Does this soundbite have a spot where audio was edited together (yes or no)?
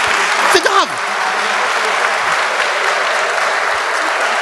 no